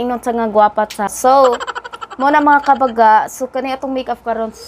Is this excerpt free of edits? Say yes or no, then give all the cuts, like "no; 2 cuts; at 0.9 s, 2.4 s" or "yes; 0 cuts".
no; 1 cut; at 1.1 s